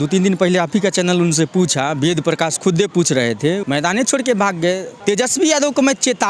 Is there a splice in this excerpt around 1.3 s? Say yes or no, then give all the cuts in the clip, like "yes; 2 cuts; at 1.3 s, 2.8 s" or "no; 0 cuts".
no; 2 cuts; at 3.6 s, 4.9 s